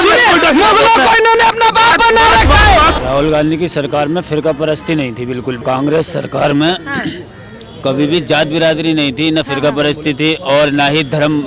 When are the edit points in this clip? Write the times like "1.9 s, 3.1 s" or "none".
2.9 s, 5.6 s